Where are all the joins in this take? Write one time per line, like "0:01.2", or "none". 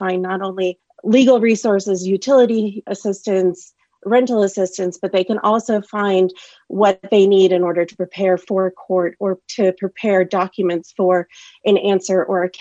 none